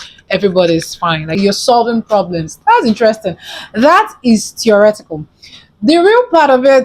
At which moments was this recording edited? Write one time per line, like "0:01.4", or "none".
0:01.3